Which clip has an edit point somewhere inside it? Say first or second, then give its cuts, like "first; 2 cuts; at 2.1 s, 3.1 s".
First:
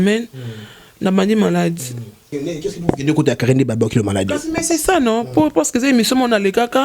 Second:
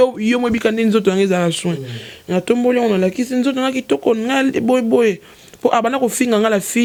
first; 1 cut; at 2.3 s